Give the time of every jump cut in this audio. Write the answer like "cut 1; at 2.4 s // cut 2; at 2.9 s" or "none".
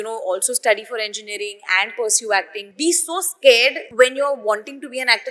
cut 1; at 2.6 s // cut 2; at 3.8 s